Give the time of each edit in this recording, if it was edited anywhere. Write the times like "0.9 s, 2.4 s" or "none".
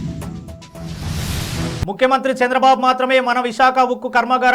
1.4 s